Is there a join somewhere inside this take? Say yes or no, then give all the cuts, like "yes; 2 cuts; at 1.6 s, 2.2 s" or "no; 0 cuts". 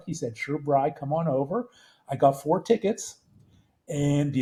no; 0 cuts